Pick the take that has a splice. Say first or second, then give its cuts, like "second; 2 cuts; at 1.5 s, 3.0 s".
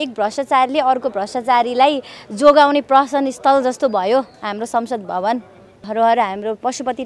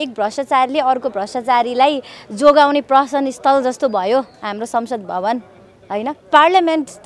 first; 1 cut; at 5.7 s